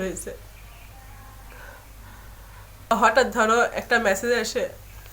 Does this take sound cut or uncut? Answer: cut